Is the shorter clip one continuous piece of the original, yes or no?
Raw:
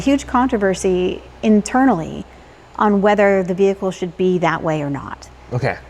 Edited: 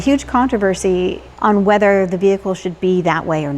no